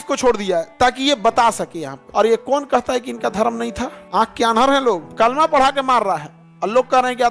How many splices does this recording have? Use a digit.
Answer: 3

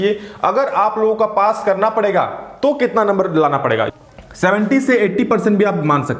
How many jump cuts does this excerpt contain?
1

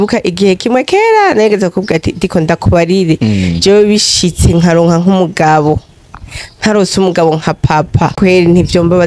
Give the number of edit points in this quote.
1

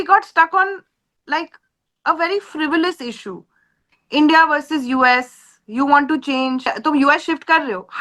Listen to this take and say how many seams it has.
1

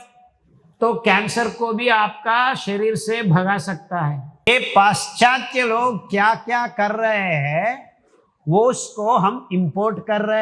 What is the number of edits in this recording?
1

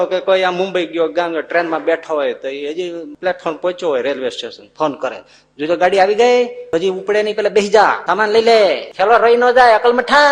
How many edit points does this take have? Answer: 4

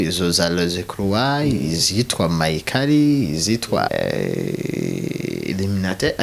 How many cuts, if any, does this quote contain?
1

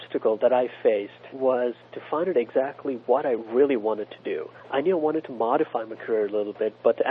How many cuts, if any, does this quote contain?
2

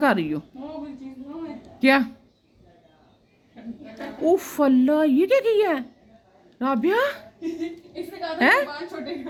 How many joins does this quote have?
0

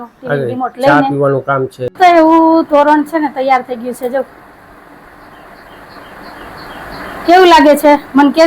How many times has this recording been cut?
1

